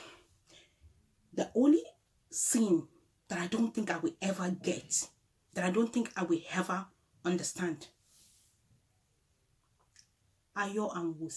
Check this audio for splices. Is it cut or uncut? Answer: uncut